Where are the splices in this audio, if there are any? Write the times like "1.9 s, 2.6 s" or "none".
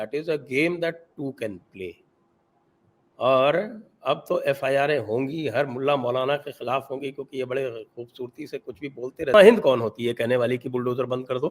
9.3 s